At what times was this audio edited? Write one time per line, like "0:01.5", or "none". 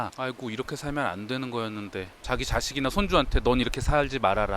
none